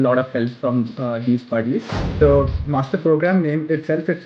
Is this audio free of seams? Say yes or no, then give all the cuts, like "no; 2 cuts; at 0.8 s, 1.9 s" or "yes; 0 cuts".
no; 1 cut; at 2.1 s